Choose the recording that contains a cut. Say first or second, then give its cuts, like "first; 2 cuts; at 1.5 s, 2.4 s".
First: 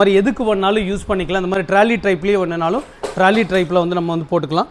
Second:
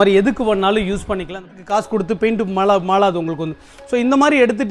second; 1 cut; at 1.5 s